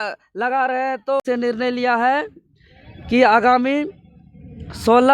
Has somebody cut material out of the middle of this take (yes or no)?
yes